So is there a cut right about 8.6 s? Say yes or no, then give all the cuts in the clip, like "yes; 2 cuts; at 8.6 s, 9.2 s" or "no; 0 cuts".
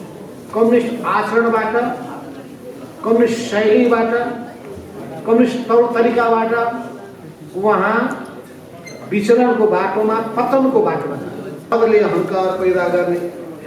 no; 1 cut; at 11.7 s